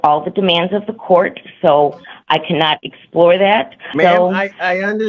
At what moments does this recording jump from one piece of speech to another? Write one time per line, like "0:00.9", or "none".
0:03.9

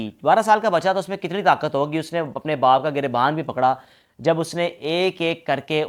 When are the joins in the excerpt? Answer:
none

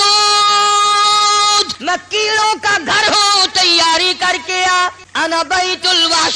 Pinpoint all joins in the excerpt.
0:01.7
0:05.0

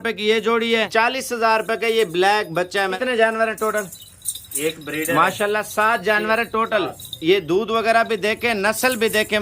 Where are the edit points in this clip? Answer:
0:00.9
0:02.9

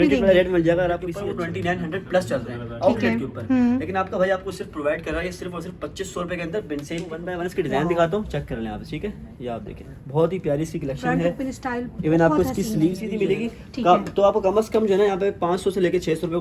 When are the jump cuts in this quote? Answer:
0:01.1
0:07.3
0:13.0

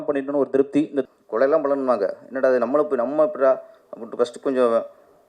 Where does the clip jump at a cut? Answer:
0:01.0

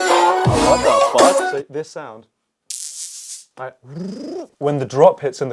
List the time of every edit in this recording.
0:01.5
0:04.5

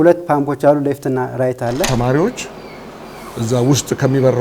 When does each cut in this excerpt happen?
0:01.9

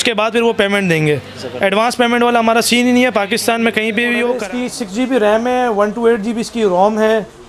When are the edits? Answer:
0:04.4

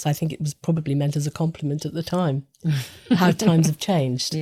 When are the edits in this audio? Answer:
none

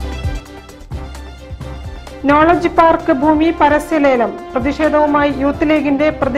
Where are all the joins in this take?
0:01.8

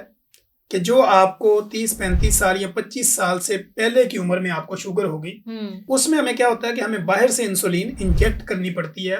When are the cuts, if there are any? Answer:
0:05.8

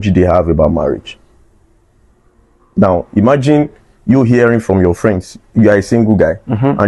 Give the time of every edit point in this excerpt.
none

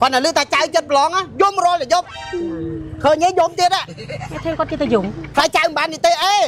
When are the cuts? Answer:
none

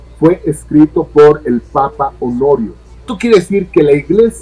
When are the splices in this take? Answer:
0:03.1

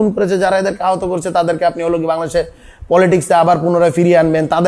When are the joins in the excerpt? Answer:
none

